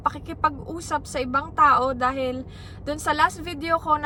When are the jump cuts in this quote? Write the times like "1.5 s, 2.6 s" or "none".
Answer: none